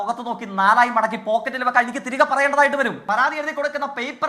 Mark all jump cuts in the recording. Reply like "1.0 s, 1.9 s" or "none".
3.0 s